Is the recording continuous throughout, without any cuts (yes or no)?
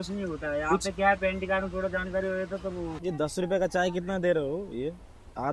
no